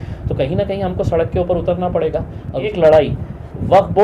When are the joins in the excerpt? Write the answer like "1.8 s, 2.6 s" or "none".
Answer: 2.7 s

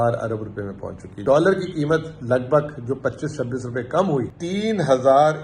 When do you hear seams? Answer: 1.2 s, 4.4 s

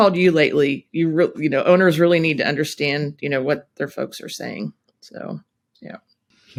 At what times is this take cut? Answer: none

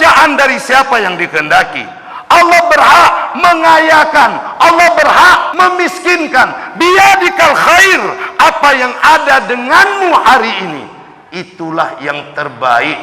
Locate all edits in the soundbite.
5.5 s

